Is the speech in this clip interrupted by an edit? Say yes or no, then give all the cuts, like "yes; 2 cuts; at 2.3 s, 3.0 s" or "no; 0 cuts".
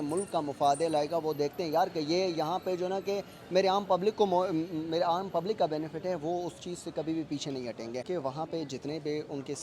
yes; 1 cut; at 8.1 s